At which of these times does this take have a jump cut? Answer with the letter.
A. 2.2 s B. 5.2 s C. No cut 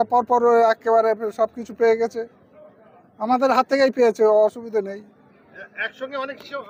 C